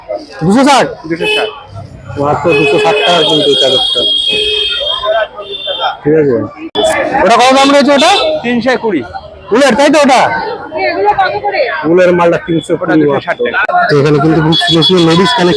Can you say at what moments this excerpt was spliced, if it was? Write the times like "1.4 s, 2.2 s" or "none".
6.7 s, 13.7 s